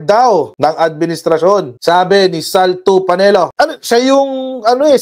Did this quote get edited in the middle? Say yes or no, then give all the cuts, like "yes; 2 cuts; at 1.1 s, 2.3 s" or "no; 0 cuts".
yes; 1 cut; at 3.5 s